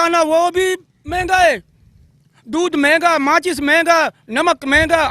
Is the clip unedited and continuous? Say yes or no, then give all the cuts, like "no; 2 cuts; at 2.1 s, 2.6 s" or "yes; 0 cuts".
yes; 0 cuts